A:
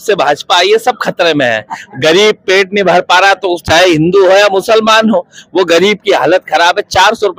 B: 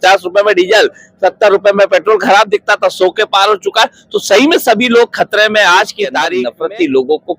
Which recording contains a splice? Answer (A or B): B